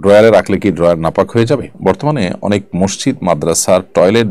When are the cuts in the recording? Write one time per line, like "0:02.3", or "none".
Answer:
0:01.7